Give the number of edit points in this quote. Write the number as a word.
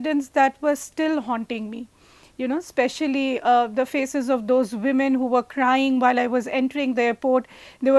zero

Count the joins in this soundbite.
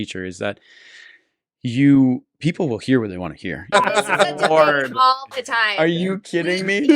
one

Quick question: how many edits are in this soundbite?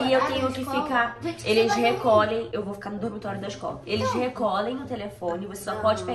one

